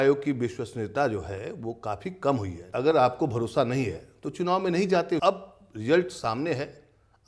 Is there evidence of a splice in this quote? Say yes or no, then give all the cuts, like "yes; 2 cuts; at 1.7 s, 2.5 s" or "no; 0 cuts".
yes; 2 cuts; at 2.7 s, 5.2 s